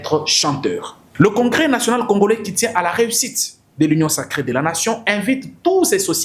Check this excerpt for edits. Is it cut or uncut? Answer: cut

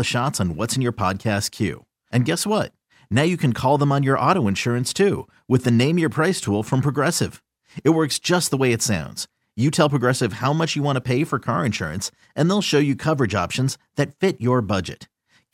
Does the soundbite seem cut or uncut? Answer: uncut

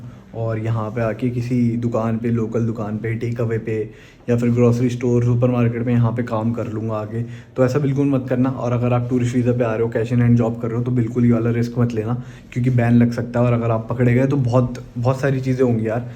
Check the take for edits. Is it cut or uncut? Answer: uncut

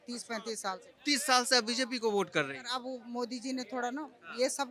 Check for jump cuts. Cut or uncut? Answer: uncut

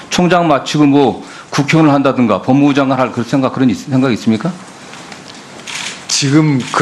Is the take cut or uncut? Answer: uncut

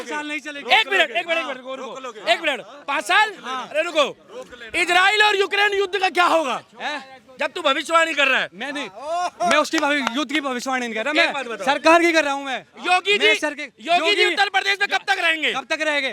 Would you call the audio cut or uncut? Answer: uncut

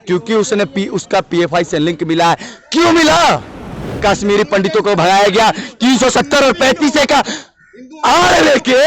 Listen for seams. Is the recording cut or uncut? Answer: cut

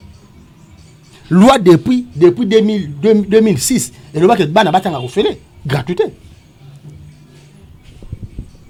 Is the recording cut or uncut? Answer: uncut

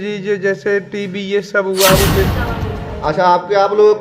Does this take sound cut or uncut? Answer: cut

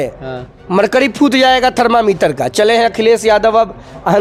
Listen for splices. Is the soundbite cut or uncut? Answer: uncut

